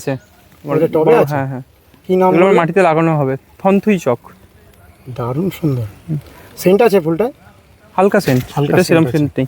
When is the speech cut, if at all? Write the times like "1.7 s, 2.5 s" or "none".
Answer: none